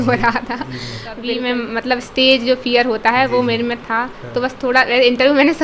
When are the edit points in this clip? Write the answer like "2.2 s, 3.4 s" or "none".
1.3 s

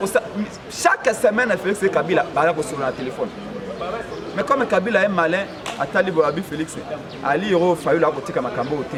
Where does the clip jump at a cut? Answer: none

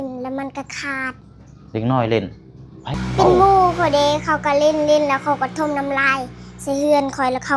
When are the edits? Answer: 2.9 s

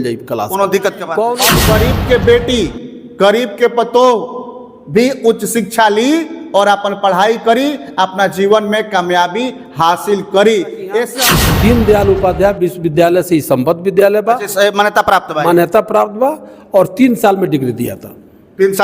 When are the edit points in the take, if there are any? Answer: 1.5 s, 11.2 s

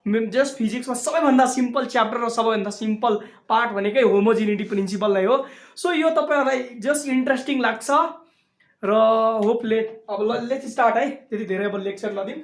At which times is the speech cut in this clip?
none

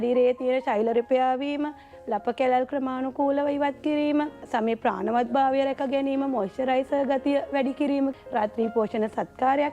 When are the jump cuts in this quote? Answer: 4.4 s, 8.1 s

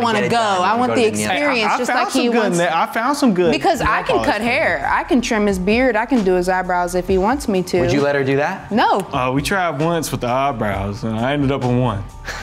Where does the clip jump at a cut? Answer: none

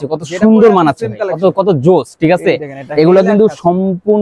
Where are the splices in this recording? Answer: none

